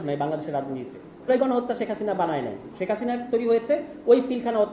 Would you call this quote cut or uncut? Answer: cut